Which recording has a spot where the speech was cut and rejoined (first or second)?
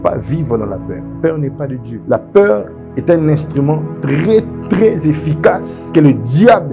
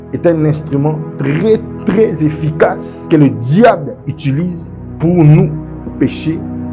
first